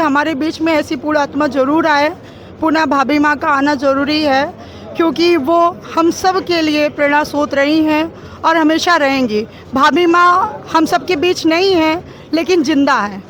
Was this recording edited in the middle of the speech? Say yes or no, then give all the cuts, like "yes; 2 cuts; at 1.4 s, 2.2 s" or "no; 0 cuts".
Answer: no; 0 cuts